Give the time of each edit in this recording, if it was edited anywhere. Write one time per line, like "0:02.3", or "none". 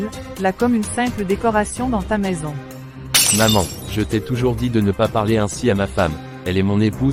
none